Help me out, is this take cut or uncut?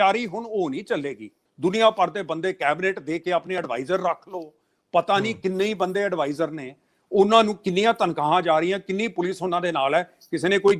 cut